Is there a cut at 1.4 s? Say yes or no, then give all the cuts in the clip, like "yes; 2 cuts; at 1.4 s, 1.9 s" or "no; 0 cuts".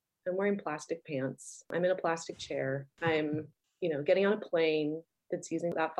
no; 2 cuts; at 2.9 s, 3.6 s